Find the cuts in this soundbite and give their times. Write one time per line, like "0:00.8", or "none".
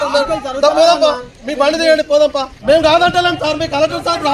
0:02.5

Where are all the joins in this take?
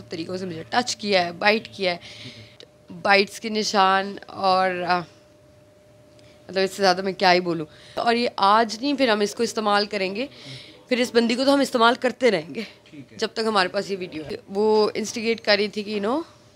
0:02.6
0:08.0
0:14.2

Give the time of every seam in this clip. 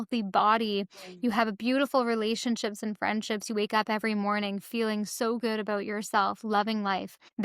none

